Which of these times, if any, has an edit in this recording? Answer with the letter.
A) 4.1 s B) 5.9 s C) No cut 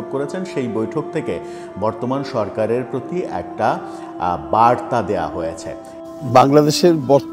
B